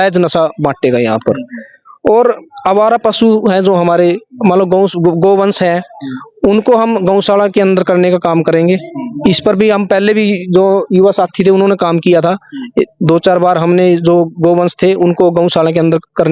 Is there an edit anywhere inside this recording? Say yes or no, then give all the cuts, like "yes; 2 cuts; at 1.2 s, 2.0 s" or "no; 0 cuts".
no; 0 cuts